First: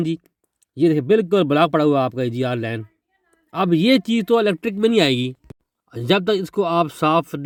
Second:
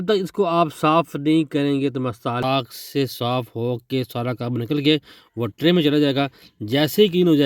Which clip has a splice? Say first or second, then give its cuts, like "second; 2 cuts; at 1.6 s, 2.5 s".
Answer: second; 1 cut; at 2.4 s